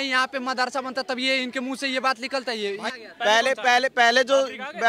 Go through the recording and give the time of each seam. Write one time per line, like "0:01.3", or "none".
0:02.9